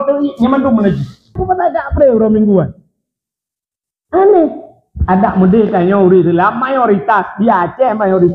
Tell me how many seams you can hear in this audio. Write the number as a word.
one